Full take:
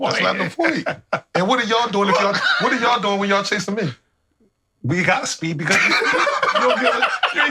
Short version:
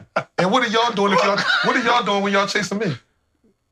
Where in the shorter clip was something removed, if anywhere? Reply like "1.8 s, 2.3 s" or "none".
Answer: none